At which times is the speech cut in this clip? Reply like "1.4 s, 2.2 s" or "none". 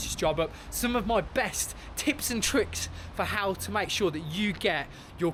none